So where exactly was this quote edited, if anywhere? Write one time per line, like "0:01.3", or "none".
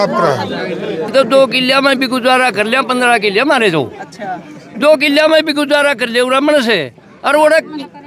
0:01.1

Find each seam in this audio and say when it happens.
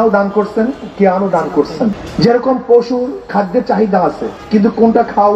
0:02.0
0:04.3

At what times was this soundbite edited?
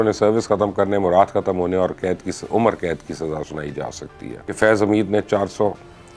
0:04.5

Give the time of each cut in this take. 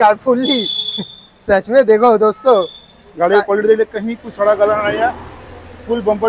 none

